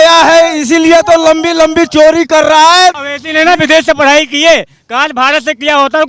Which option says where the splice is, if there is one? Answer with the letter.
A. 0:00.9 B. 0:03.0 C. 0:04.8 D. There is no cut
B